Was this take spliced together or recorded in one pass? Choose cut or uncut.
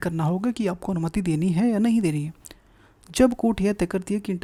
uncut